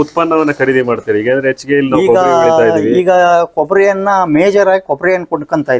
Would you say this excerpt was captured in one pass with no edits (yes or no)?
yes